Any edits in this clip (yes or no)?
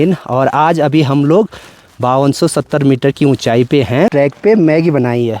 yes